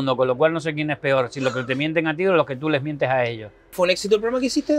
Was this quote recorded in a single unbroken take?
no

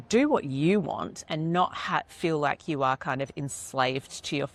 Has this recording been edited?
no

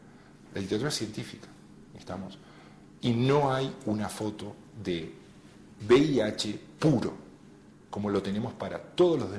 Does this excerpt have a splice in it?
no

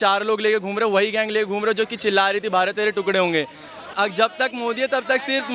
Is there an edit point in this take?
yes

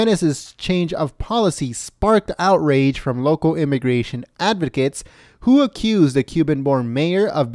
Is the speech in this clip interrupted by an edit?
no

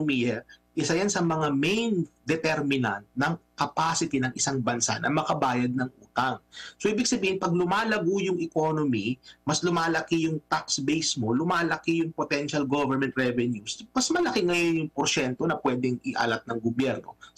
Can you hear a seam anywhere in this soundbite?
no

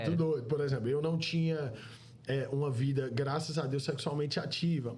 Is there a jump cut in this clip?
no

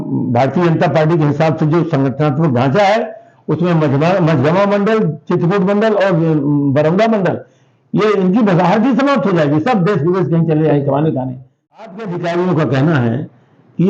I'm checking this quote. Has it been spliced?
yes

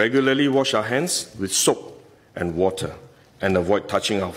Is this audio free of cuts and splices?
yes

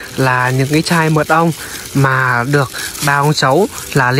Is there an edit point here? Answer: no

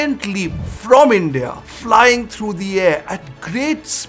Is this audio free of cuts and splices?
yes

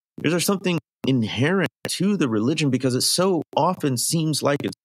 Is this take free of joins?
no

